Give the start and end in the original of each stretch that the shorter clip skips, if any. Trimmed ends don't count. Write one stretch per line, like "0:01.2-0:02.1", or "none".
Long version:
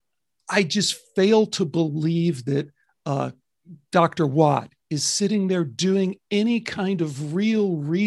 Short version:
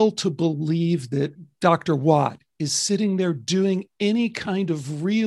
0:02.8-0:03.7